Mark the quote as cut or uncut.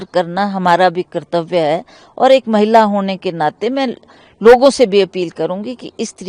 uncut